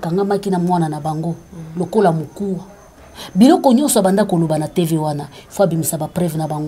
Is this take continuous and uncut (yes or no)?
yes